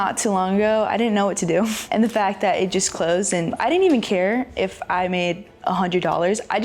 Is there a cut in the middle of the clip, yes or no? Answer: yes